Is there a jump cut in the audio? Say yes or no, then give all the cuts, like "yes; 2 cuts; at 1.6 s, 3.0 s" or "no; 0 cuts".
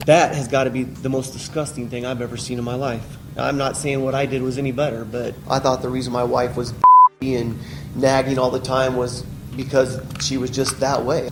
no; 0 cuts